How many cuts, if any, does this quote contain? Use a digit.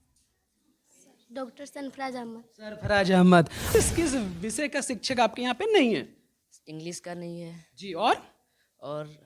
1